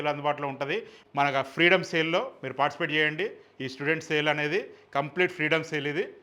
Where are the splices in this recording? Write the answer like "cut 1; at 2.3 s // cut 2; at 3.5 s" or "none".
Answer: cut 1; at 1.0 s